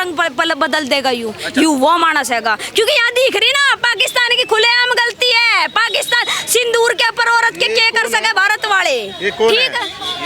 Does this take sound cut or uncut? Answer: uncut